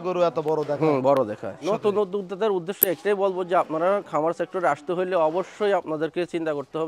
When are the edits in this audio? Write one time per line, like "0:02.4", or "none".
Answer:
0:01.6